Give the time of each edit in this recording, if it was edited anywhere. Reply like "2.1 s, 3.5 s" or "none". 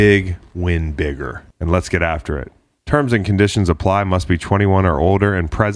1.4 s

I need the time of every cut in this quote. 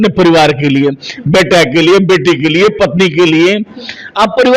none

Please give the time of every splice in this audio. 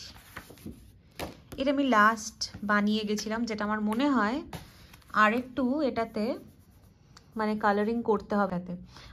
none

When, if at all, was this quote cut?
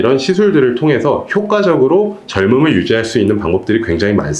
none

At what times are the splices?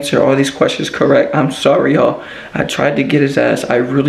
none

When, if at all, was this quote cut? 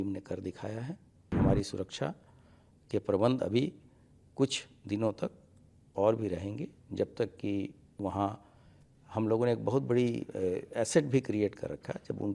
1.3 s

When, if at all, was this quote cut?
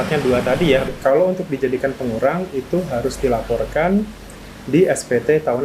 0.9 s

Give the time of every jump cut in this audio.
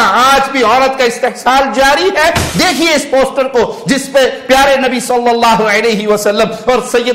2.4 s

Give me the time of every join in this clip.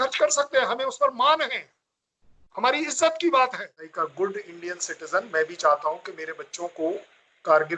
3.9 s

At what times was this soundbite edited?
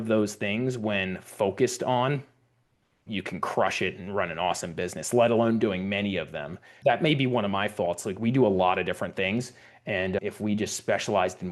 6.8 s, 10.2 s

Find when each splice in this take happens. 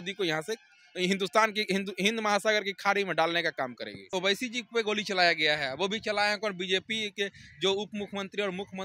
4.0 s

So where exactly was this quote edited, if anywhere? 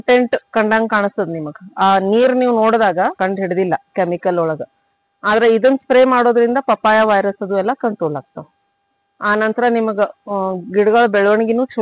3.2 s

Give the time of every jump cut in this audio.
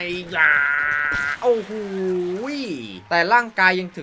none

